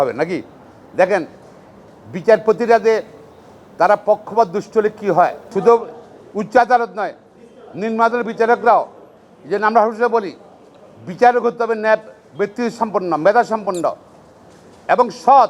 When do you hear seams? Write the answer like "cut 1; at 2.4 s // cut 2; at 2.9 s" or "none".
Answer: cut 1; at 5.4 s